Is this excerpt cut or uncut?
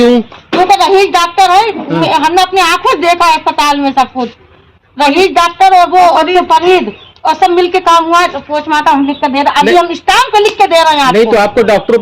cut